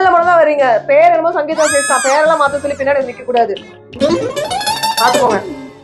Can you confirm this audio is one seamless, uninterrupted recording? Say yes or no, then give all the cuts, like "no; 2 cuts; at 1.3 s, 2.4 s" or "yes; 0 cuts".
yes; 0 cuts